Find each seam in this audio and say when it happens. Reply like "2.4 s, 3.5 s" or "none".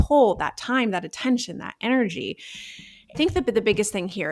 3.1 s